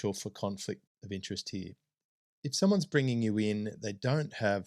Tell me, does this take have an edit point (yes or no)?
yes